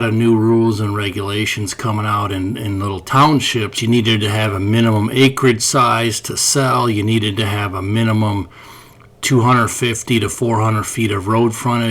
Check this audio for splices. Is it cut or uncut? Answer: cut